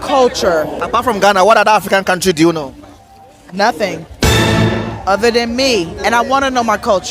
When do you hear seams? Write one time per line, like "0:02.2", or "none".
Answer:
none